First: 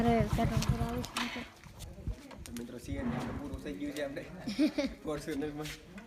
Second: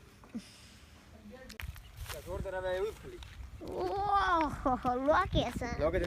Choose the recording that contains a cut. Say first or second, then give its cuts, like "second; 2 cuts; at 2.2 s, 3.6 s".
second; 1 cut; at 1.6 s